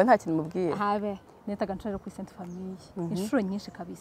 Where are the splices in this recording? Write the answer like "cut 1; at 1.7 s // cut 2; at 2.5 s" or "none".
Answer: cut 1; at 1.3 s

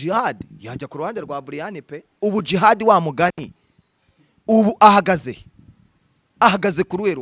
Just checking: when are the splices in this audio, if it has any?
cut 1; at 2.1 s

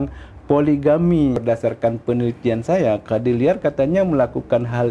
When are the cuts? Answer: cut 1; at 1.4 s

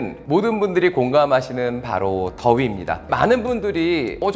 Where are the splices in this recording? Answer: cut 1; at 3.0 s

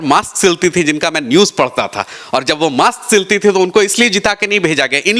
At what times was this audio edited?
none

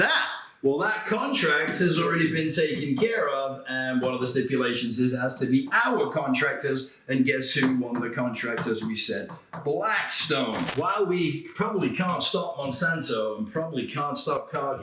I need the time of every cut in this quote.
cut 1; at 10.7 s

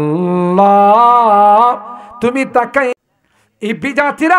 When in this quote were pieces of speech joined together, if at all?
cut 1; at 2.9 s

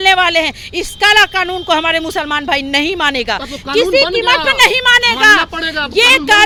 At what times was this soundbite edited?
none

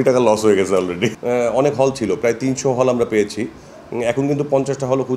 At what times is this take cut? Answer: cut 1; at 1.1 s

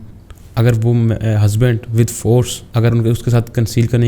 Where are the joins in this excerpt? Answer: cut 1; at 2.6 s

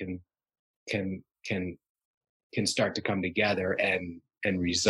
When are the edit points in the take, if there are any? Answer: none

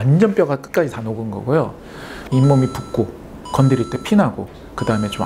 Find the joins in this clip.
cut 1; at 2.2 s

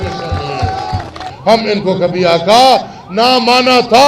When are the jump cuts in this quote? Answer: cut 1; at 1.3 s

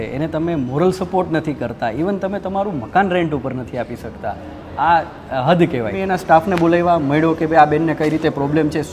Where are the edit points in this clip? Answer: cut 1; at 6.0 s

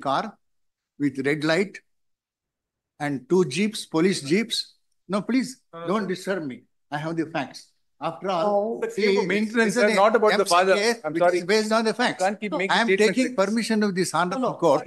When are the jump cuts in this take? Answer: none

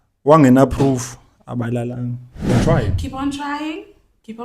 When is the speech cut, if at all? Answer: cut 1; at 2.5 s

